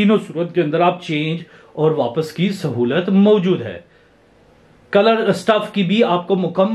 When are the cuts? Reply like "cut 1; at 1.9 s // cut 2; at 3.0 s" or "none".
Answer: none